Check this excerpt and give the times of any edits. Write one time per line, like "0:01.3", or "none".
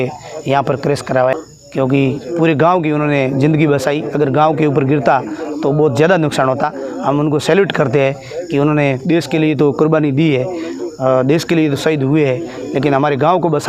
0:01.3